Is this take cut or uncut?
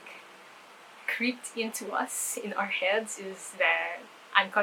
uncut